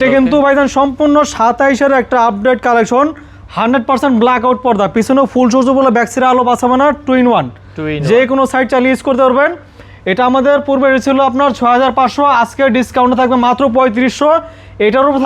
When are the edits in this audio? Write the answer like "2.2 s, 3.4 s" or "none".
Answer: none

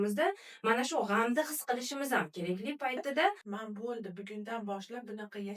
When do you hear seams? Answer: 3.5 s

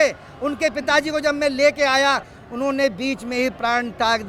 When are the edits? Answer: 2.4 s

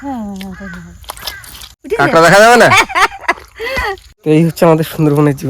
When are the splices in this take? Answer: 1.7 s, 4.1 s

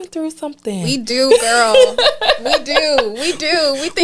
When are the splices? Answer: none

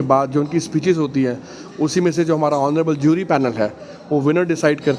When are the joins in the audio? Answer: none

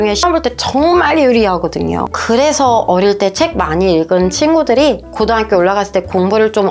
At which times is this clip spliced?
2.2 s

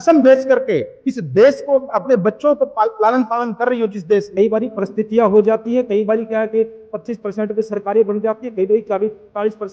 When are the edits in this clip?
4.3 s

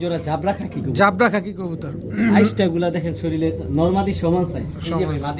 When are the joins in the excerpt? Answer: none

